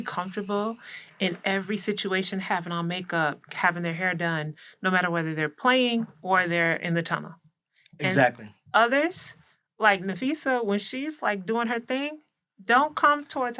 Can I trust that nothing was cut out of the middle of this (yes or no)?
yes